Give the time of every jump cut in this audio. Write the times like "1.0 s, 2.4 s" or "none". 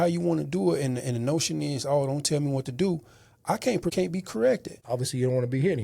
3.9 s, 4.7 s